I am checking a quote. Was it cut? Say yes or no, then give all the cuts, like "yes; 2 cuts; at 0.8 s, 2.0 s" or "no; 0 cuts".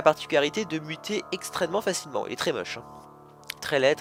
no; 0 cuts